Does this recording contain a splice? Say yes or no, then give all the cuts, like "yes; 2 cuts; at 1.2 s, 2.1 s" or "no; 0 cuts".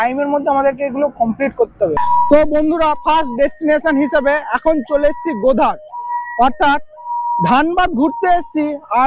yes; 1 cut; at 2.0 s